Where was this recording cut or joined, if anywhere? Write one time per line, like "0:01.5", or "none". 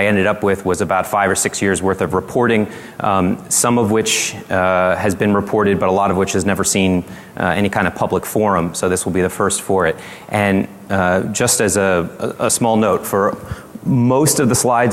none